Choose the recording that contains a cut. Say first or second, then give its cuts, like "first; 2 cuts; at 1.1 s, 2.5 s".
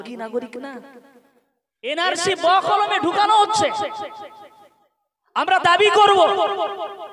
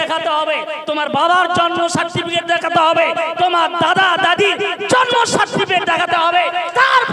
first; 1 cut; at 1.9 s